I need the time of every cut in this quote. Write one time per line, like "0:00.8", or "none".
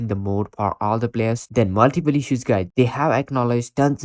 0:01.4
0:02.7